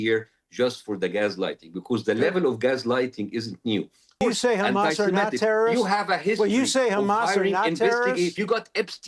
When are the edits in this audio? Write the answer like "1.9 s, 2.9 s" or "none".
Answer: 4.2 s, 8.3 s

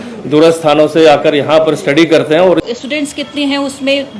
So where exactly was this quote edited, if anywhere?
2.6 s

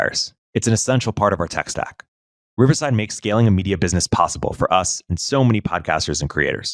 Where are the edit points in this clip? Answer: none

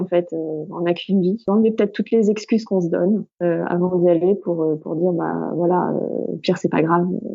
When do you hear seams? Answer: 1.4 s, 3.3 s

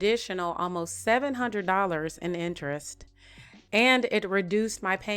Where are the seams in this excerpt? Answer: none

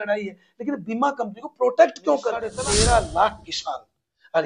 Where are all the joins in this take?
2.5 s

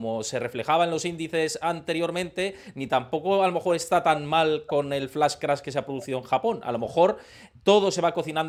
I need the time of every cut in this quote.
none

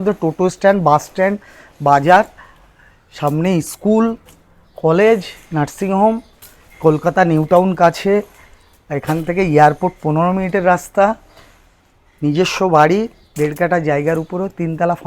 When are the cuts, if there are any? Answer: none

